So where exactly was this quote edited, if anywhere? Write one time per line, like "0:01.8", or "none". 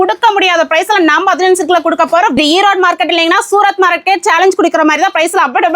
0:02.4